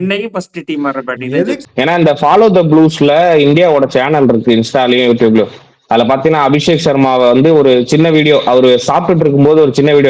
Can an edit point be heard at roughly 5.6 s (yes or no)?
no